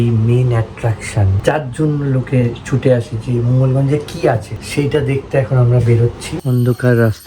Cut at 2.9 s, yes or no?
no